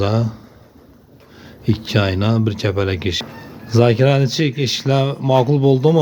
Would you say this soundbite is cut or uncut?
cut